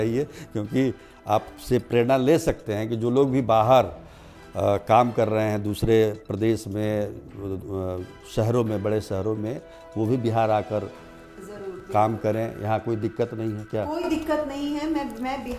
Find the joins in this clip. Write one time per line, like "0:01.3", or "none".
none